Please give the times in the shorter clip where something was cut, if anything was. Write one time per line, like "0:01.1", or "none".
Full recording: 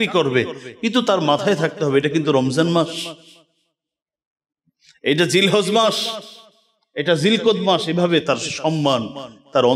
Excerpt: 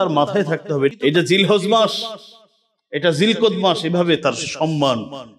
0:00.9